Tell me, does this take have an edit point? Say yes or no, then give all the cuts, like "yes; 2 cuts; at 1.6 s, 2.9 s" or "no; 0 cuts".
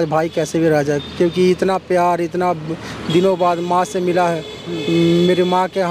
no; 0 cuts